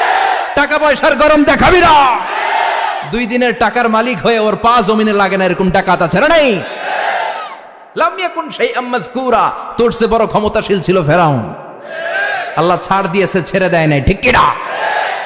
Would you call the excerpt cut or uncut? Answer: uncut